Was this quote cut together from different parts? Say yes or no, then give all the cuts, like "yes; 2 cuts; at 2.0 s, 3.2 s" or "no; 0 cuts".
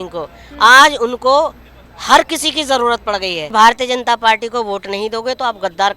yes; 1 cut; at 3.5 s